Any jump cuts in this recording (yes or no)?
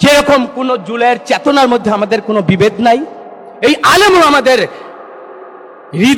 no